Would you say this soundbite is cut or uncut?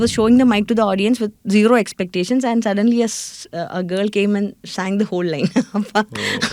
uncut